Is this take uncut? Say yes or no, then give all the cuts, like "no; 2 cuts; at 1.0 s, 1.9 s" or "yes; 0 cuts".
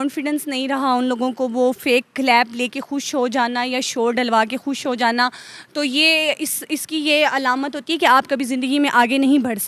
yes; 0 cuts